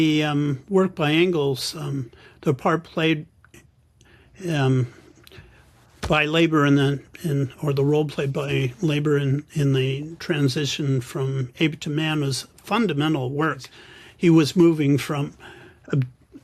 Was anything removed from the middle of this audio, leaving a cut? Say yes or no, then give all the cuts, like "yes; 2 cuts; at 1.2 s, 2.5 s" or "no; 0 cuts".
yes; 1 cut; at 13.7 s